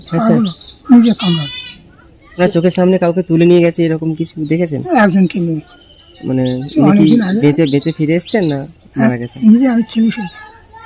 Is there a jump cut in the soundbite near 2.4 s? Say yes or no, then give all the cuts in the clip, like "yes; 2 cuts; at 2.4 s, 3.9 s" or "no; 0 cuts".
yes; 1 cut; at 2.4 s